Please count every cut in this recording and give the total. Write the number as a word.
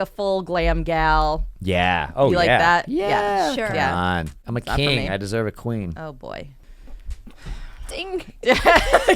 two